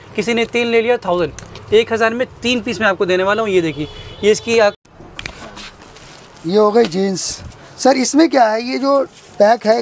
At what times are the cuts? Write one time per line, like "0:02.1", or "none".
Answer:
0:04.8